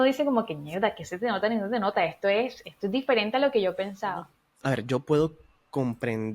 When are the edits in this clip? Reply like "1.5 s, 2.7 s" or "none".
4.4 s